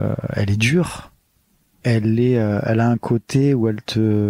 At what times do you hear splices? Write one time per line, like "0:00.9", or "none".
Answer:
none

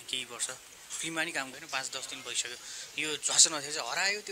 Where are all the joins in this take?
0:01.5

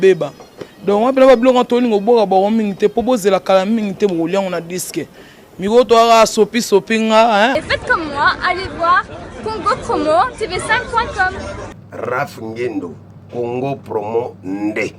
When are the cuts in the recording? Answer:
0:07.5

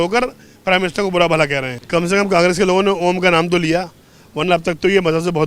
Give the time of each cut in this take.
0:01.7

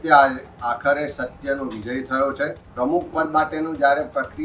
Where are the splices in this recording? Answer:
0:02.6

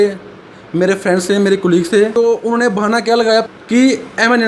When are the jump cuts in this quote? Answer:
0:02.1
0:03.4

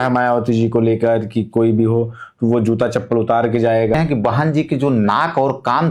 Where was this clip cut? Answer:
0:03.9

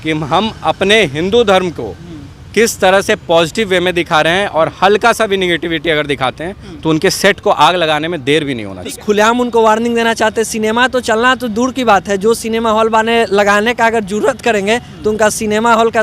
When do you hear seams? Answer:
0:08.9

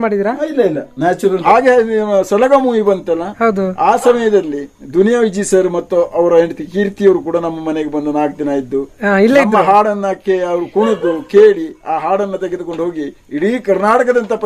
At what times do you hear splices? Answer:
0:01.4

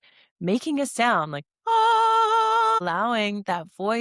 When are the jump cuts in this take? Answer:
0:02.8

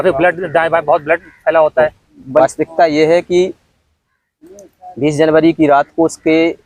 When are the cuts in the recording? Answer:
0:02.4

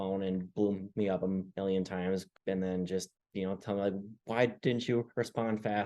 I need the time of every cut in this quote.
0:02.3
0:03.2

